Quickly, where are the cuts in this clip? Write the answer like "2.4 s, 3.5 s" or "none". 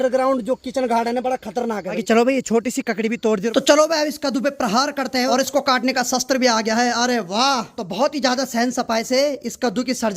2.0 s, 3.5 s, 5.3 s, 7.7 s

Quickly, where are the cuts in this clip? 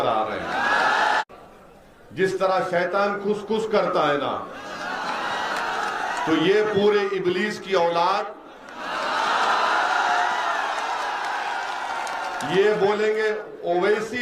1.2 s

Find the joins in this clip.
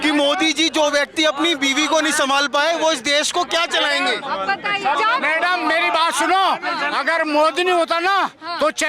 5.0 s

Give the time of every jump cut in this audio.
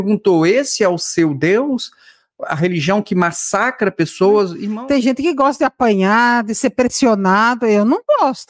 4.6 s

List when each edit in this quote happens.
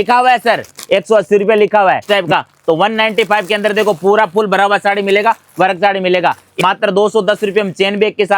2.0 s, 6.5 s

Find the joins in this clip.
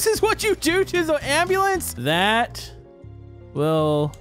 1.9 s

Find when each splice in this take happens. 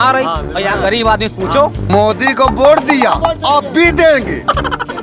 1.8 s

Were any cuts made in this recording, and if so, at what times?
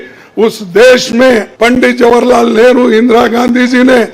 1.5 s

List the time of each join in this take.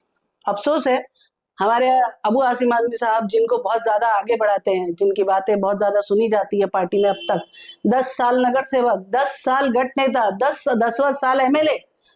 none

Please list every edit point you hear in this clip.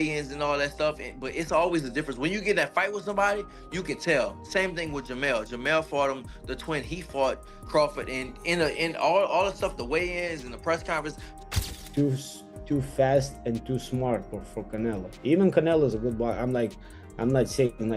11.3 s

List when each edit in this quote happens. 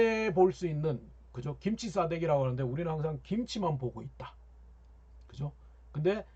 none

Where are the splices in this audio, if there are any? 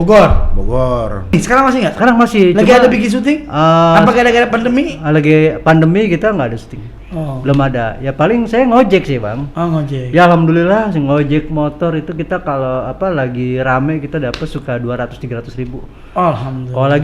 1.3 s

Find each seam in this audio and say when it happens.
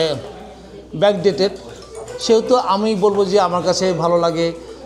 none

